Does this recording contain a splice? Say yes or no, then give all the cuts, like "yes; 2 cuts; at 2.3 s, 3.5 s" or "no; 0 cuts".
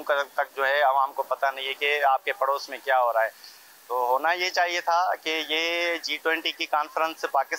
no; 0 cuts